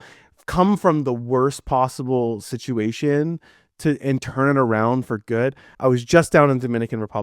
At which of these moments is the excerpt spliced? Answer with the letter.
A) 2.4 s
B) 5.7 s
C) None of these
B